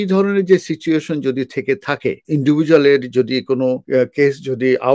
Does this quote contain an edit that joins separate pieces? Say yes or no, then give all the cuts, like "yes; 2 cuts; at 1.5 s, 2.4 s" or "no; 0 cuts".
yes; 2 cuts; at 2.2 s, 3.8 s